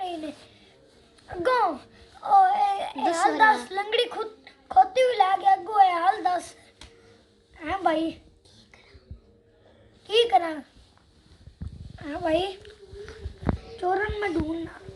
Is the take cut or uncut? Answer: uncut